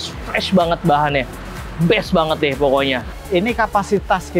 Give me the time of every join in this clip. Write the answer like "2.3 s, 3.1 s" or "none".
3.1 s